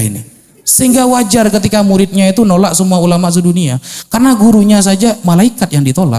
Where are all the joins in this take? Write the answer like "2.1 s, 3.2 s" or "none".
none